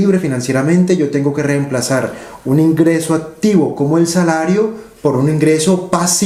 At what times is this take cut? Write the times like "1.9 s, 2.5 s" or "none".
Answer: none